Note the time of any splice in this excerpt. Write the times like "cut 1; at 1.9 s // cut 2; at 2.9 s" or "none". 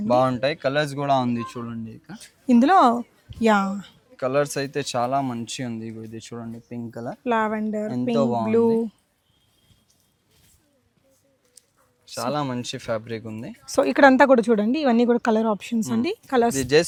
none